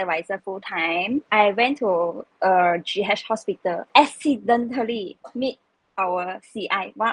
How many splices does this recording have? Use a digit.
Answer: 2